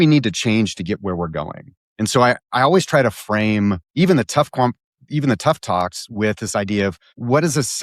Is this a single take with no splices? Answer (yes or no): yes